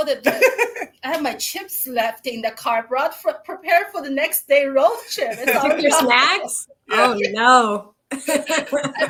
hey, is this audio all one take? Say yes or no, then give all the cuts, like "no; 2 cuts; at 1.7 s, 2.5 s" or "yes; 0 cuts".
yes; 0 cuts